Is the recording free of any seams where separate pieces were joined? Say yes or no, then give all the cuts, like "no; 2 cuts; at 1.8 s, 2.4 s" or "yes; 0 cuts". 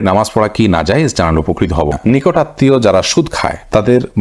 no; 1 cut; at 2.0 s